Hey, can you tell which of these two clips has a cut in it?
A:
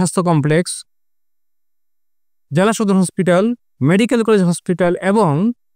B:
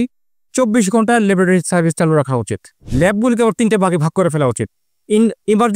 B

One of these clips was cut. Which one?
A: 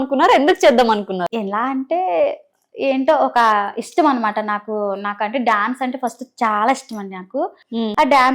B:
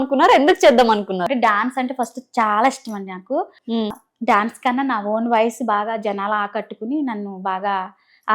B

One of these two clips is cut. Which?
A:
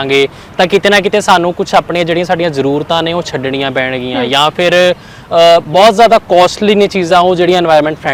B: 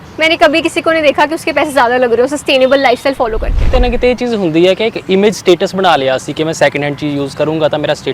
B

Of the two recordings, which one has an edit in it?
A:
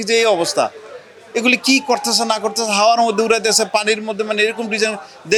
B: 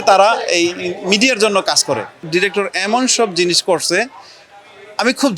B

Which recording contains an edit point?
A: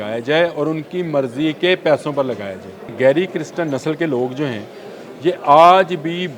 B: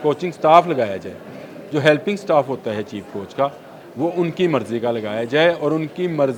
A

